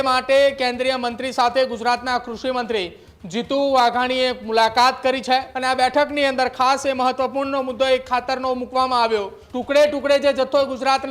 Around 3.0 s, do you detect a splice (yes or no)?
no